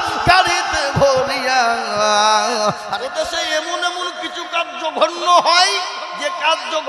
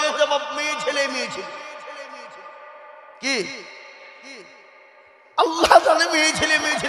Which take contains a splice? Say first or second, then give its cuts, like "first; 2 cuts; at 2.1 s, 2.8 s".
first; 1 cut; at 2.8 s